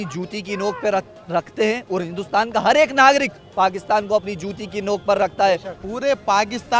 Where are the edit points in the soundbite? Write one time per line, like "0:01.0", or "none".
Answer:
0:05.7